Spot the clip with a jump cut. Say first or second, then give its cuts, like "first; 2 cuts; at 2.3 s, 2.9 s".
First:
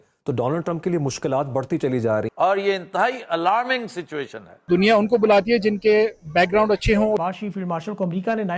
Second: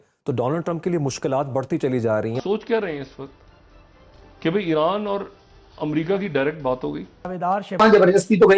first; 2 cuts; at 2.3 s, 7.2 s